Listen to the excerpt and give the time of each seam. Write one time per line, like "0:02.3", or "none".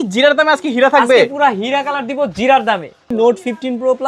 0:03.1